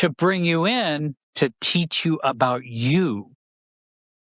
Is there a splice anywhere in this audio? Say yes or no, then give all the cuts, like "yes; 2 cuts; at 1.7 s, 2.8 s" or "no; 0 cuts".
no; 0 cuts